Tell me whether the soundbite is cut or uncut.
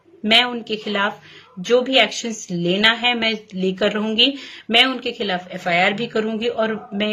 uncut